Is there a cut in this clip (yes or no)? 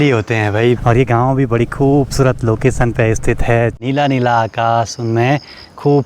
yes